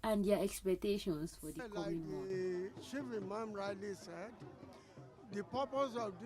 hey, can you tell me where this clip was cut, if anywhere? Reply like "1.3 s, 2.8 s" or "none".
2.1 s